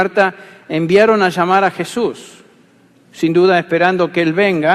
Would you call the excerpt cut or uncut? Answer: cut